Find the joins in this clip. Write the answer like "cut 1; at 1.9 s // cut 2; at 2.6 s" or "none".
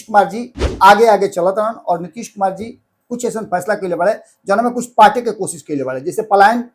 none